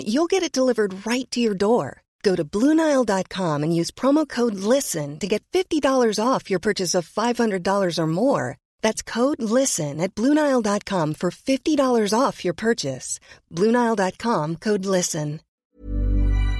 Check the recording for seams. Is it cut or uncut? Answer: cut